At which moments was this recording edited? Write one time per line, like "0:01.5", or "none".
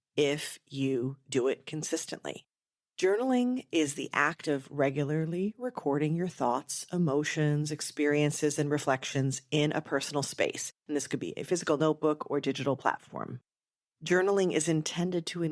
none